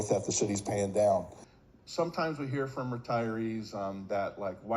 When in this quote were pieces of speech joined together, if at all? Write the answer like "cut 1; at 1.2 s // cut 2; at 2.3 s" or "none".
cut 1; at 1.3 s